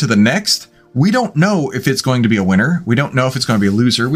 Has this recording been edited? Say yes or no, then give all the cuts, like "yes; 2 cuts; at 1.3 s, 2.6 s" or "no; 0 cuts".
no; 0 cuts